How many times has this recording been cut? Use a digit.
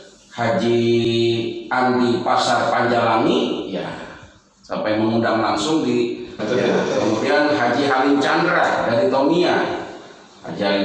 2